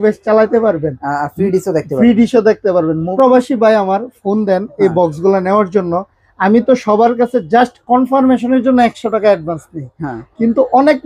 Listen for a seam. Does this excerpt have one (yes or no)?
yes